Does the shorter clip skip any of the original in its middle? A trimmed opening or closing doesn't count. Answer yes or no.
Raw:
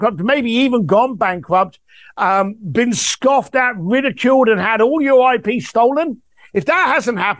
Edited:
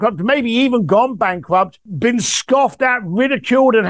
yes